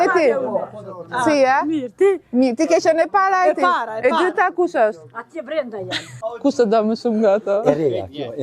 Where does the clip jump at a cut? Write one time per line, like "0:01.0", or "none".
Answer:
0:06.2